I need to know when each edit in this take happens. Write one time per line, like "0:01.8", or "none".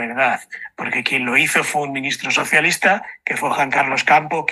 none